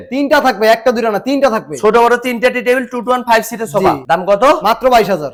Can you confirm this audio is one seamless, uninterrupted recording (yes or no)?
yes